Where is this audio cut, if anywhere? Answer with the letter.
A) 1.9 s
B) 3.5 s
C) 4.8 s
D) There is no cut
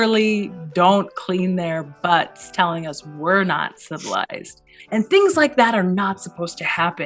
C